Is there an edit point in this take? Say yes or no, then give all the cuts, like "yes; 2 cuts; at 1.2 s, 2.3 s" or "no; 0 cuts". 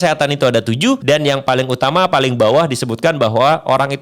yes; 1 cut; at 1.0 s